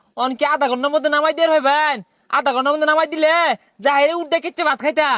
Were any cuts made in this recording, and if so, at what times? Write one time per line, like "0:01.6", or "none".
none